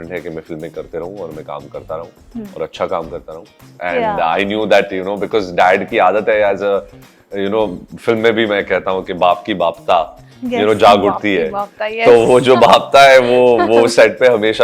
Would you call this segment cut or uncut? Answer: cut